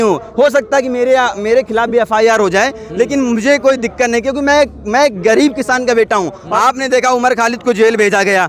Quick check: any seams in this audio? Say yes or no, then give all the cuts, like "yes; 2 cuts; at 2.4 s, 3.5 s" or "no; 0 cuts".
yes; 1 cut; at 6.4 s